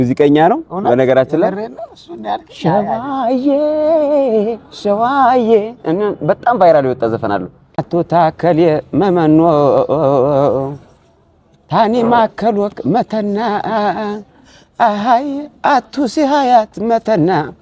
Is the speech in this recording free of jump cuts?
no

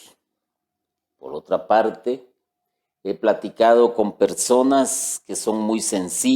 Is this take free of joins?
no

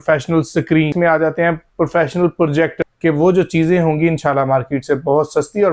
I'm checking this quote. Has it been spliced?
yes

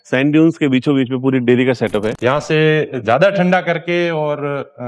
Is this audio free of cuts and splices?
no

